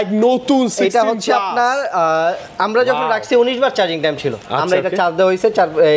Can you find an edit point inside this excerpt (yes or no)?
no